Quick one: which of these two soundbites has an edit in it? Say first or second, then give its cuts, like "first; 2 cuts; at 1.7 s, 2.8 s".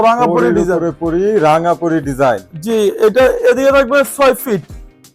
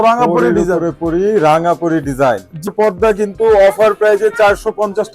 second; 1 cut; at 2.7 s